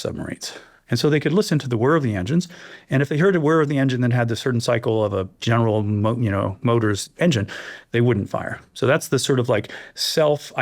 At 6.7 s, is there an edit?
no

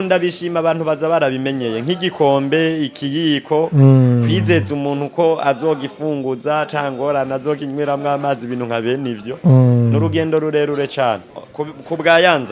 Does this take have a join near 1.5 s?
no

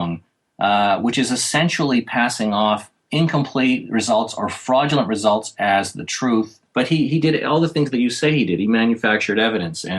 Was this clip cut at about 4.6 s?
no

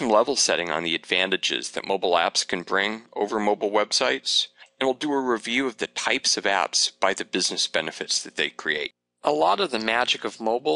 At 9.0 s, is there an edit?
yes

